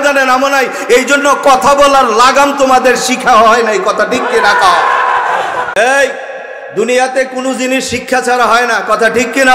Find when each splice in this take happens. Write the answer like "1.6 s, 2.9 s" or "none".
5.7 s